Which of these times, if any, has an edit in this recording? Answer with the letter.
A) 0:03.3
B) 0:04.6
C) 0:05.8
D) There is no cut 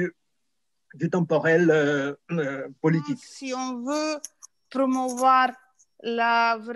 A